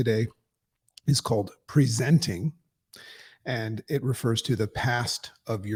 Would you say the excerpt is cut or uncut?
uncut